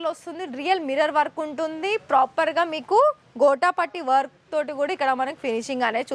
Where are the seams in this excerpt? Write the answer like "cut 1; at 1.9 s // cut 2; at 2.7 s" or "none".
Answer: none